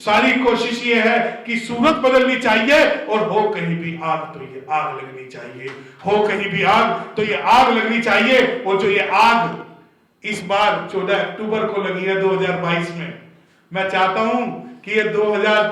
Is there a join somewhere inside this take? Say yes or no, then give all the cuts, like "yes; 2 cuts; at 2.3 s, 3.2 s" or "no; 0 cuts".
no; 0 cuts